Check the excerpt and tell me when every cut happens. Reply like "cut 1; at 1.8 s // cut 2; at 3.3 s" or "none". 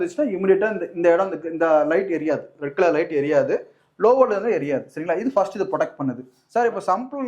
cut 1; at 6.3 s

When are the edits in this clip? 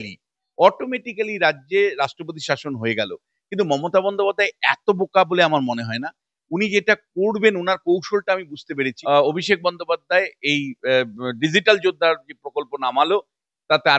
cut 1; at 9.0 s

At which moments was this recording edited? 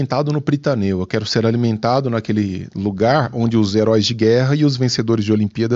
none

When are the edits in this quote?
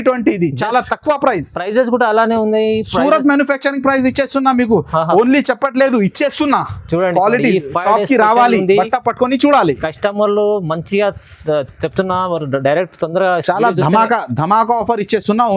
none

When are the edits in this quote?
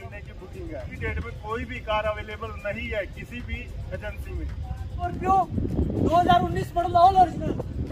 cut 1; at 0.9 s // cut 2; at 5.1 s

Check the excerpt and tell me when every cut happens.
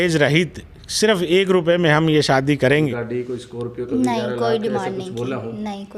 cut 1; at 3.0 s

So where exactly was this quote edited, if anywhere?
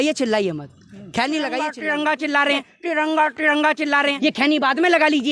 cut 1; at 1.8 s // cut 2; at 4.1 s

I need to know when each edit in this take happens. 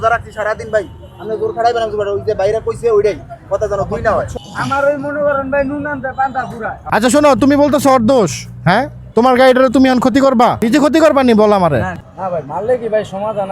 cut 1; at 4.3 s // cut 2; at 6.7 s // cut 3; at 9.0 s // cut 4; at 12.0 s

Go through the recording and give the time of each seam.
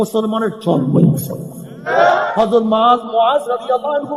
cut 1; at 2.2 s

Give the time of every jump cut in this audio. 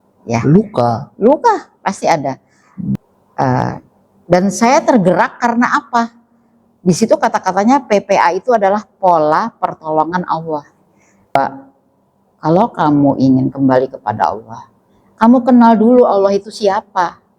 cut 1; at 3.0 s // cut 2; at 11.3 s

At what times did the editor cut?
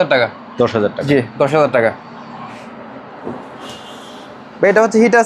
none

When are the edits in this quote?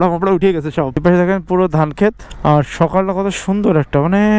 cut 1; at 1.0 s // cut 2; at 2.3 s

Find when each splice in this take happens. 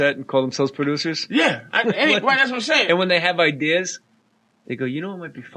cut 1; at 2.2 s

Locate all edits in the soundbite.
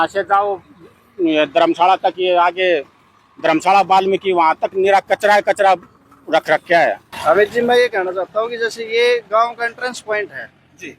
cut 1; at 7.1 s

